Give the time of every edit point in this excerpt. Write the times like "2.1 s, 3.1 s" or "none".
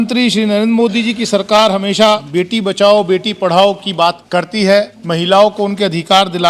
2.3 s, 4.2 s, 5.0 s